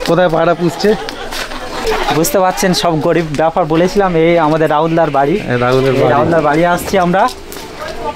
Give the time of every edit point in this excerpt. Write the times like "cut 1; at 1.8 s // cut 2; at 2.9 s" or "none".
none